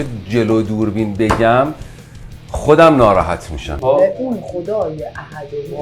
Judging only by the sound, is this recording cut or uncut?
cut